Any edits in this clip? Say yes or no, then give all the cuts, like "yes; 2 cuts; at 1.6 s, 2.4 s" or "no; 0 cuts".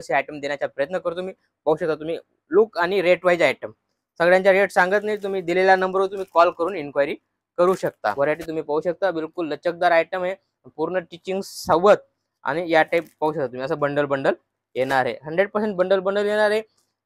yes; 1 cut; at 8.1 s